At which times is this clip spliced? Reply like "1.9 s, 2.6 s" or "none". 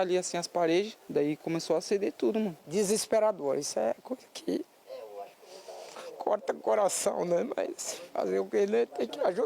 1.0 s, 2.6 s

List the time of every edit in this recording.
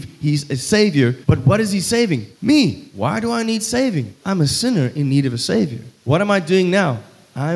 1.2 s, 2.3 s, 2.9 s, 4.1 s, 5.9 s

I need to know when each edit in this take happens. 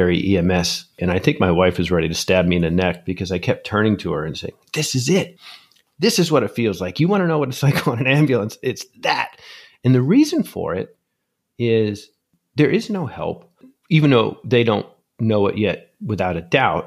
1.0 s

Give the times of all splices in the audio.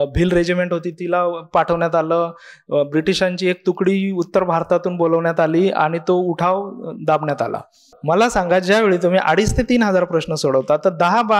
7.9 s

